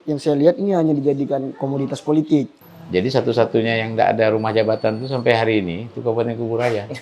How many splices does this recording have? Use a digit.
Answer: 1